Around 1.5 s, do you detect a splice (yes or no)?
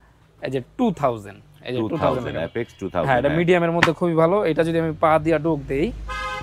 no